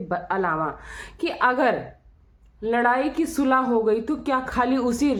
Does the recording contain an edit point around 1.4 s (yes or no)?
no